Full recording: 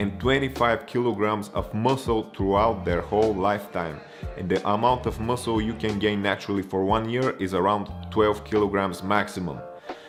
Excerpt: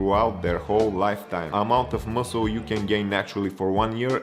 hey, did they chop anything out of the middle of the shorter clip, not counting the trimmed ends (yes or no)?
yes